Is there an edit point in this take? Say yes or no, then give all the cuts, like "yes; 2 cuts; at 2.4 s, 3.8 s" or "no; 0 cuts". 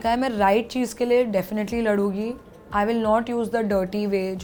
no; 0 cuts